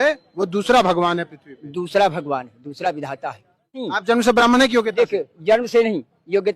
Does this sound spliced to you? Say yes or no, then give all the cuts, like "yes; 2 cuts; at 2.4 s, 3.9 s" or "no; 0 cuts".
yes; 1 cut; at 3.9 s